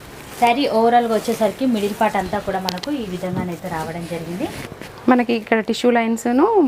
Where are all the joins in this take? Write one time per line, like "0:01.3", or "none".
none